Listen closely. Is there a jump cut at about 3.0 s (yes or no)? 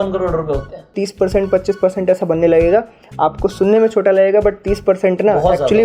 no